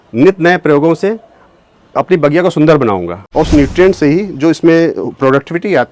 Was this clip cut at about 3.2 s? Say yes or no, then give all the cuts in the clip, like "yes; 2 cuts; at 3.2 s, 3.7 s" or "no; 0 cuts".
yes; 1 cut; at 3.2 s